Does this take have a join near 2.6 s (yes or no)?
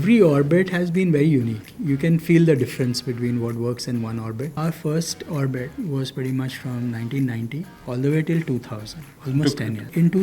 no